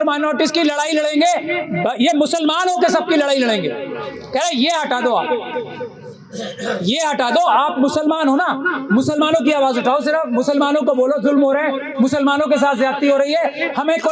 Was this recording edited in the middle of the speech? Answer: no; 0 cuts

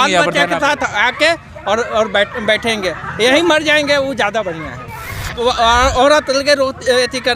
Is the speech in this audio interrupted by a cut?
yes; 1 cut; at 5.3 s

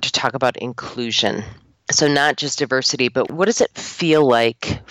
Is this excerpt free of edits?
yes; 0 cuts

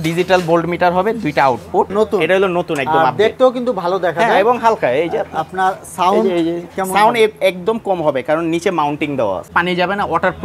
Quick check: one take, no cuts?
no; 2 cuts; at 1.9 s, 9.5 s

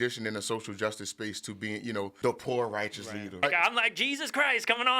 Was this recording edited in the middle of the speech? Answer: yes; 2 cuts; at 2.1 s, 3.4 s

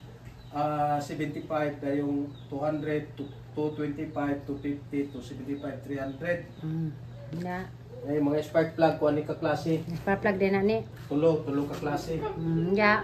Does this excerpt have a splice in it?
no; 0 cuts

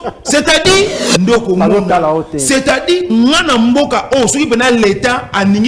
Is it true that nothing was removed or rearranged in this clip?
no; 1 cut; at 1.0 s

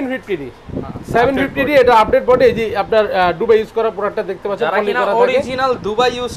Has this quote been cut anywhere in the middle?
no; 0 cuts

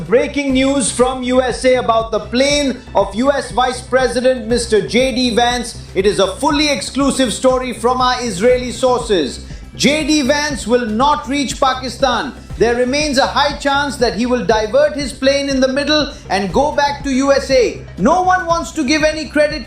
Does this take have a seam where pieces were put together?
no; 0 cuts

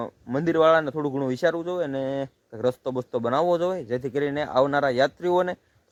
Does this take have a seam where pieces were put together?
no; 0 cuts

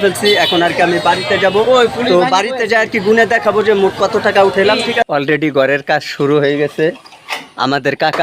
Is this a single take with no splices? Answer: no; 1 cut; at 5.1 s

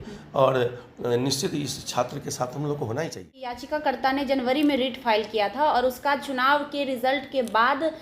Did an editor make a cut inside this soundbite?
yes; 1 cut; at 3.6 s

